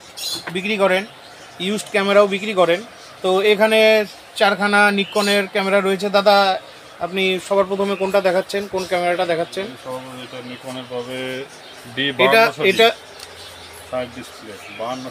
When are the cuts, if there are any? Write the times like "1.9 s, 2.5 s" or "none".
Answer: none